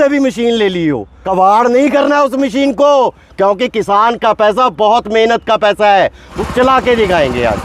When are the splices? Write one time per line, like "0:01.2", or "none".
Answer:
0:01.1
0:06.3